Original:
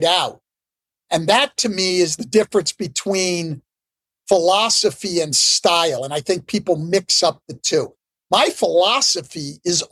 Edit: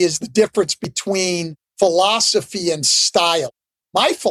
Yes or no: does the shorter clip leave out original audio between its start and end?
yes